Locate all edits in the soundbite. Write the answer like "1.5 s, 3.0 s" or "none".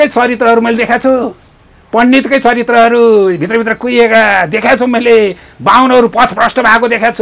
none